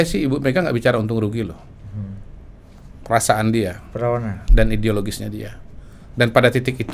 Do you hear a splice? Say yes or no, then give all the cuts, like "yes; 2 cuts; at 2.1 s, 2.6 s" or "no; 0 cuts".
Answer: no; 0 cuts